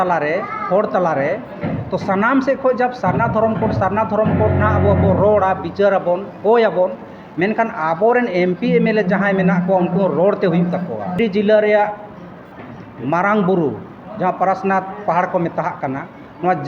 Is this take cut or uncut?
cut